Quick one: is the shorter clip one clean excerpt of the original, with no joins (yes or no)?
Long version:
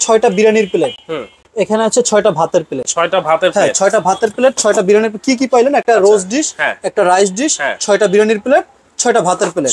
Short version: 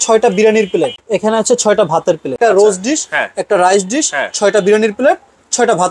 no